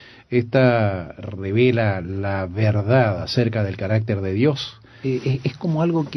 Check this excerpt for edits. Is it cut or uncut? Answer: uncut